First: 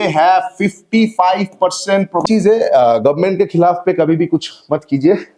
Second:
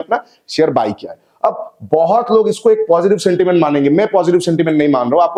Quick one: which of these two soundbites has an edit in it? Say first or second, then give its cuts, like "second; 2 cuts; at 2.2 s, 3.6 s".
first; 1 cut; at 2.2 s